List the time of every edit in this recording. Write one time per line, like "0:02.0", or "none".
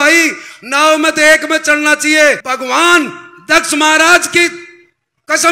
0:02.5